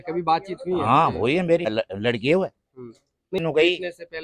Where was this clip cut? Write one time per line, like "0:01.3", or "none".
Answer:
0:01.7
0:03.4